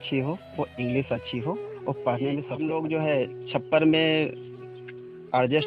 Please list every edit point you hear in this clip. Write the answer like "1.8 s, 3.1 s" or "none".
2.5 s